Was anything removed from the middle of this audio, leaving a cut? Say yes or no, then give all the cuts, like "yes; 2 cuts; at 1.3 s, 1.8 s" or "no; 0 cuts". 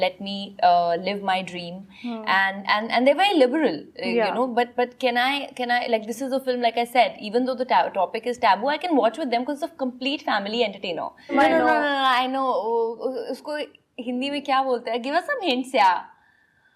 yes; 1 cut; at 11.3 s